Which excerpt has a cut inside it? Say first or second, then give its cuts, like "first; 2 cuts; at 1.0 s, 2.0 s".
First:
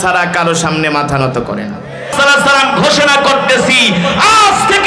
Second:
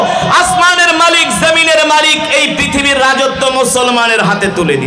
first; 1 cut; at 2.1 s